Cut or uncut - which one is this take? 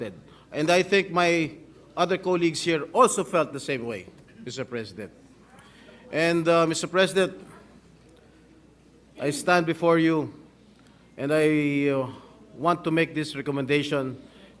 uncut